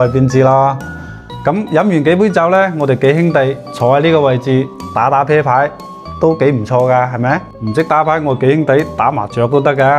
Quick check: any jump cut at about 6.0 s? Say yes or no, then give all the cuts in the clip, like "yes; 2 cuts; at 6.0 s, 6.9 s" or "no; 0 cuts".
no; 1 cut; at 7.5 s